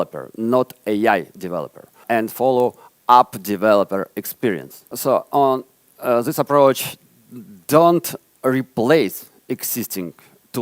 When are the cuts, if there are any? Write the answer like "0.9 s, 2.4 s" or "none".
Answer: 2.0 s, 4.9 s